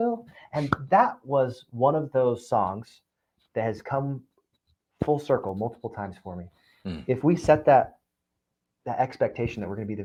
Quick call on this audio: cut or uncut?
uncut